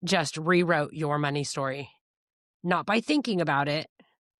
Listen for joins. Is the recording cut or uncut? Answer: uncut